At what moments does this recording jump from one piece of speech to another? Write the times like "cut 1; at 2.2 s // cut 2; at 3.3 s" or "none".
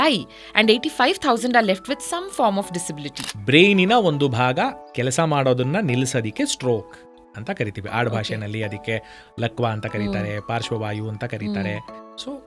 cut 1; at 3.2 s